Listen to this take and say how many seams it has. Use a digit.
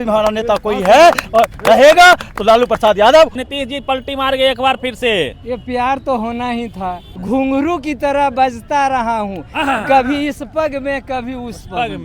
2